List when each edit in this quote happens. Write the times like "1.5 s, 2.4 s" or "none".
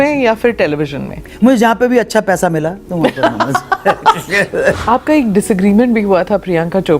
4.8 s